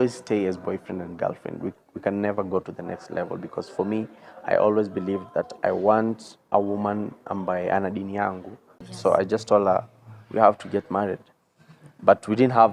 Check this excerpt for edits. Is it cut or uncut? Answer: cut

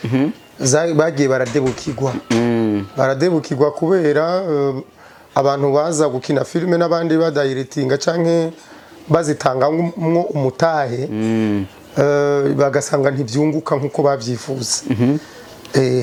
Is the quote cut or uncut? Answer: uncut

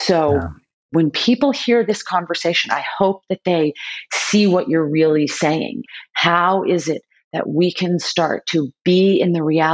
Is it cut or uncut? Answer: cut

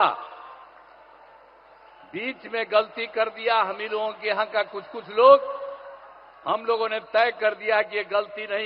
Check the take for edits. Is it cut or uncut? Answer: uncut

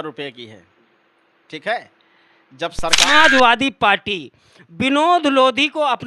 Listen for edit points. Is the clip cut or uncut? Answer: cut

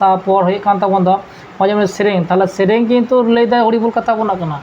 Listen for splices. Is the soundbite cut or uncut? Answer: uncut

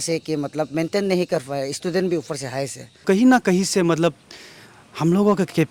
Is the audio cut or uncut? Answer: cut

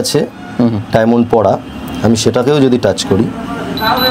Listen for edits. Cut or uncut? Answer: uncut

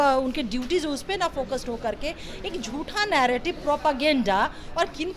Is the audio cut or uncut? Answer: uncut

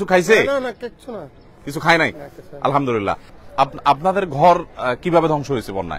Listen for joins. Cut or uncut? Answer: cut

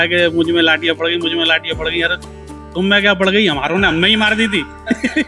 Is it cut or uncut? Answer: uncut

